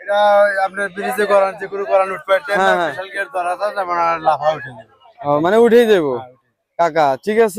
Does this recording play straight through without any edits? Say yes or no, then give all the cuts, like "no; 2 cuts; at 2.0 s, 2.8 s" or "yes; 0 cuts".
yes; 0 cuts